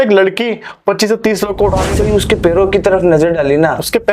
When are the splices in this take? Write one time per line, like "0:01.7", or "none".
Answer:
0:01.9